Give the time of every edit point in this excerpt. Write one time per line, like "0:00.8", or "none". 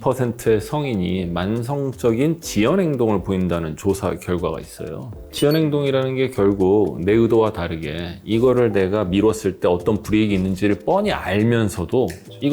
none